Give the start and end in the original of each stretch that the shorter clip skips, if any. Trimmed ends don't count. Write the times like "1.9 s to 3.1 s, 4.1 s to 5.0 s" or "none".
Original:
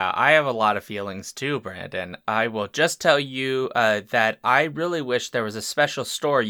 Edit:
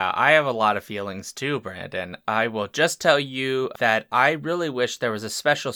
3.7 s to 4.0 s